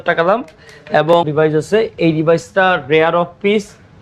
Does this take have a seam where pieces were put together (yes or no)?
yes